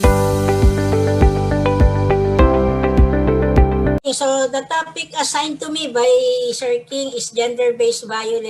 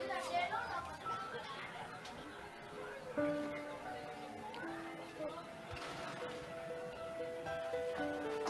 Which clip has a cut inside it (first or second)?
first